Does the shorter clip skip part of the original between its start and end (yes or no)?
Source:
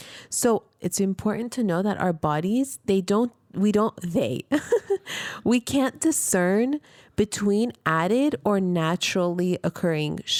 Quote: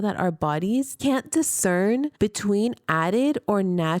yes